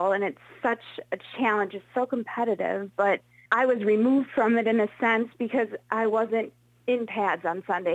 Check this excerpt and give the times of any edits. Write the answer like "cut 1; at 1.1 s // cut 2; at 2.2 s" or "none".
cut 1; at 3.3 s